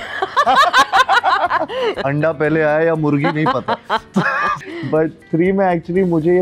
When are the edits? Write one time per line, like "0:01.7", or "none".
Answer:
0:02.0
0:04.6